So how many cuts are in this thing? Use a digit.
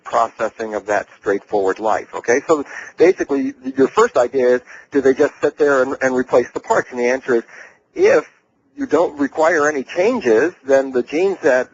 0